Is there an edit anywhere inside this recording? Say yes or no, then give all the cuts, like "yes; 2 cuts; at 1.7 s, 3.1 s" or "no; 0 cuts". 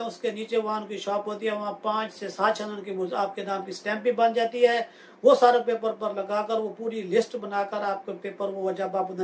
no; 0 cuts